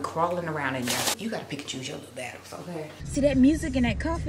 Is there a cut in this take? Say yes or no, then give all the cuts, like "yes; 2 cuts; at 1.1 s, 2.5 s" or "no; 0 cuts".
yes; 2 cuts; at 1.1 s, 3.0 s